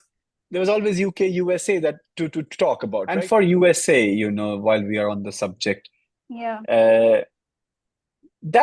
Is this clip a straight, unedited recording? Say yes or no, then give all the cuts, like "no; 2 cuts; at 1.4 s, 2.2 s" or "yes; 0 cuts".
no; 1 cut; at 3.1 s